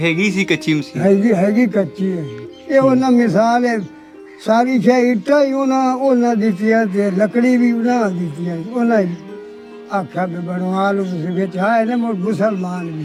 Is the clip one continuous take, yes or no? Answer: yes